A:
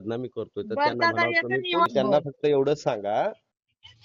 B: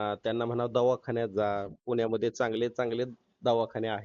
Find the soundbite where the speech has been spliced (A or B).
A